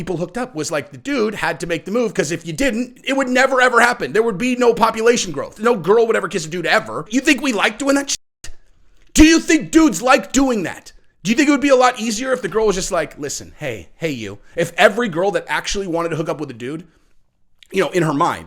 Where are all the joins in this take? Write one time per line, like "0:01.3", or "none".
0:05.5
0:07.1